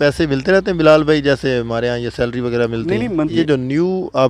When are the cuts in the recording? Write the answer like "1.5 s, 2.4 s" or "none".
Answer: 3.3 s